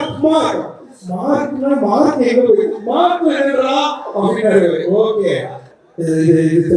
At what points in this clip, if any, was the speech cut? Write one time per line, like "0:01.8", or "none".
0:05.6